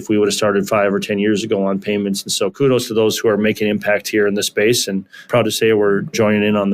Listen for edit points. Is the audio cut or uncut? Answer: cut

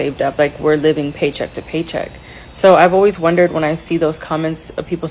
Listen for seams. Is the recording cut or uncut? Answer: uncut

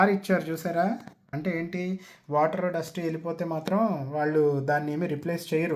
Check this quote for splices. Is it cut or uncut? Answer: cut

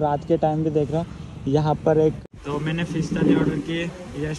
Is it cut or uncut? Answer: cut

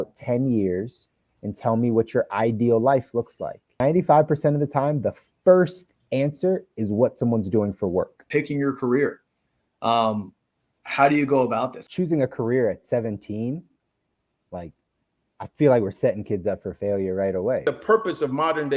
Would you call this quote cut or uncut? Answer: cut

